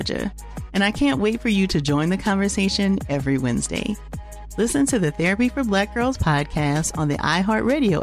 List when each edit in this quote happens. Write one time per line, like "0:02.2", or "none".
none